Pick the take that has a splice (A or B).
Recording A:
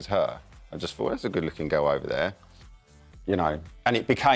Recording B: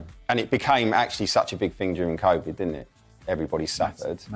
A